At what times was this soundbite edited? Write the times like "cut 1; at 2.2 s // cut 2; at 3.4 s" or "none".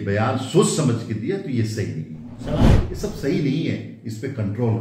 cut 1; at 2.8 s

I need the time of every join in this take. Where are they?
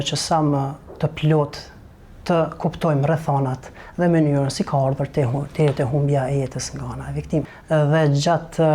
cut 1; at 7.6 s

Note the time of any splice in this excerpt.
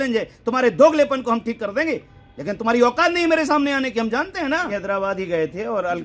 cut 1; at 4.7 s

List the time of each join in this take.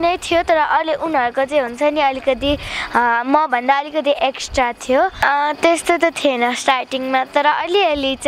cut 1; at 5.2 s

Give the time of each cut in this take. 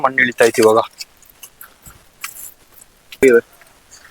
cut 1; at 3.2 s

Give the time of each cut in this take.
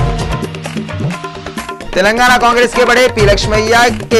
cut 1; at 1.3 s

